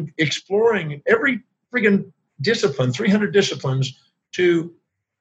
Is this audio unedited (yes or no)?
yes